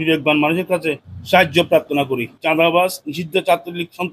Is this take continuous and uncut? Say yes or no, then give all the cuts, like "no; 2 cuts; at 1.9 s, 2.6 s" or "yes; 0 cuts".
no; 1 cut; at 2.4 s